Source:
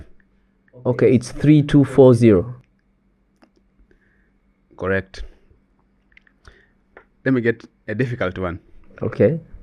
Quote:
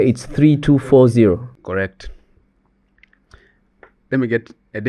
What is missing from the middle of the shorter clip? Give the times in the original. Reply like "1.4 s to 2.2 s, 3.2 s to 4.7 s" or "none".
2.6 s to 4.7 s